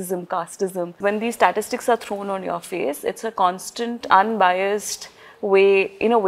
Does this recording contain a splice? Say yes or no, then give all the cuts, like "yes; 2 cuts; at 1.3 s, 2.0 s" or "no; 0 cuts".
yes; 1 cut; at 1.0 s